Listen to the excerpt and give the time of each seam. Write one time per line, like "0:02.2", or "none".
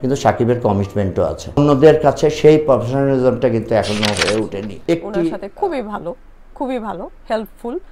0:05.2